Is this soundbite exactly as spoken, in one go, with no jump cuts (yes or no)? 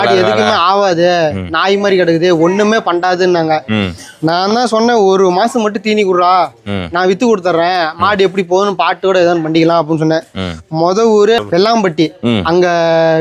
yes